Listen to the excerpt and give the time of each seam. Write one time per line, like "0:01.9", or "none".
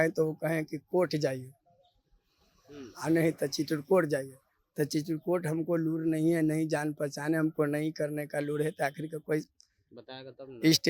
none